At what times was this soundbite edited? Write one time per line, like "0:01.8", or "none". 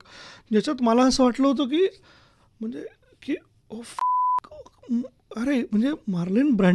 none